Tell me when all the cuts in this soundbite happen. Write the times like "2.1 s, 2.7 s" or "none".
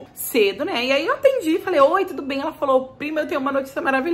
none

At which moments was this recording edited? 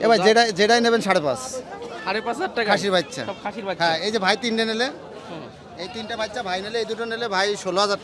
none

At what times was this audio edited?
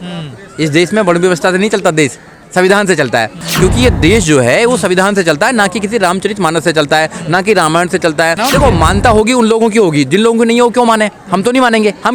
3.5 s, 8.4 s

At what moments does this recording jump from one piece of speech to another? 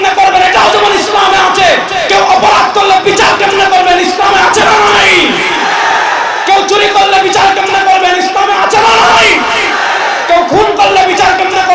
none

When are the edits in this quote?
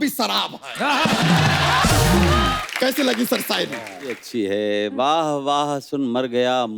2.6 s, 4.2 s

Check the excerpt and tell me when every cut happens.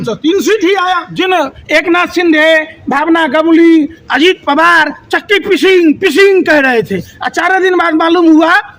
1.1 s

